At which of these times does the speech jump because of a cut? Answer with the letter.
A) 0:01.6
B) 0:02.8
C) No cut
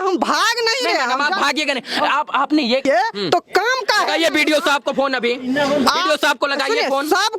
B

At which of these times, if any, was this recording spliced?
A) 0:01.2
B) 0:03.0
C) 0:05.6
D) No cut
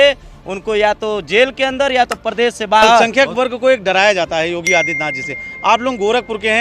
B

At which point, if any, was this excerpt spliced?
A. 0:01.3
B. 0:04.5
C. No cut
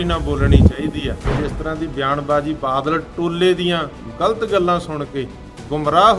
A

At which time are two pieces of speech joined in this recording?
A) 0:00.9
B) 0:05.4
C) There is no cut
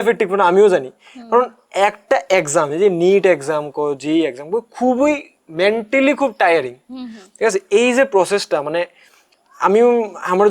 C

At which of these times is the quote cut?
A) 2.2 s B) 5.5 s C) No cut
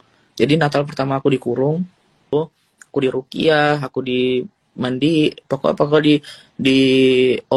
A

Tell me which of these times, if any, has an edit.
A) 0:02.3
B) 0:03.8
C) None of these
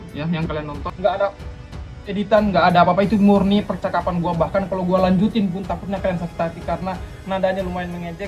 C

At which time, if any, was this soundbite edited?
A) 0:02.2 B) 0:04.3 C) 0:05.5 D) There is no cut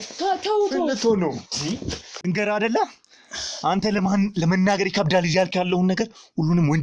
A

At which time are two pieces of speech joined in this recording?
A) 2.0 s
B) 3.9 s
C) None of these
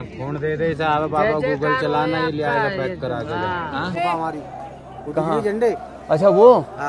B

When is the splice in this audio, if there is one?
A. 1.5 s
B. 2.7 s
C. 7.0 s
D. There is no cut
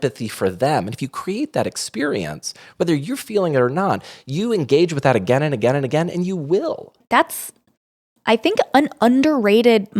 C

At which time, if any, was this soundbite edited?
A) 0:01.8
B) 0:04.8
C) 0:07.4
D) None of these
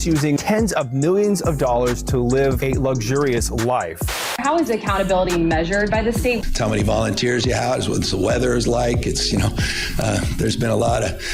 C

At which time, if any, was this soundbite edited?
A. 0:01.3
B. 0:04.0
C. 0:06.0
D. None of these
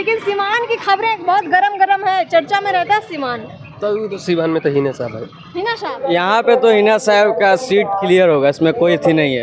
C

